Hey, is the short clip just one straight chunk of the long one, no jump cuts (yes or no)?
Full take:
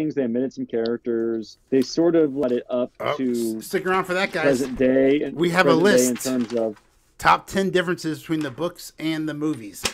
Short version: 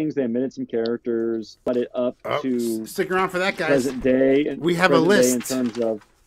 no